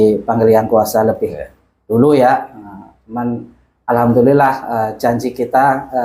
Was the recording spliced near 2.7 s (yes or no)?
no